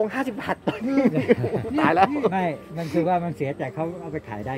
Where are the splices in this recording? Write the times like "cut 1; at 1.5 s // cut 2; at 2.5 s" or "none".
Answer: none